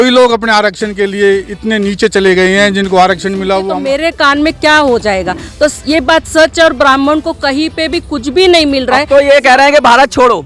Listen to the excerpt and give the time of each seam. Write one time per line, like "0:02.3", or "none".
0:03.7